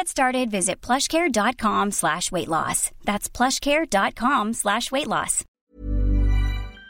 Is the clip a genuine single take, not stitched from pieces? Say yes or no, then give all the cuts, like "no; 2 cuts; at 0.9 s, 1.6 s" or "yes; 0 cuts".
no; 1 cut; at 5.5 s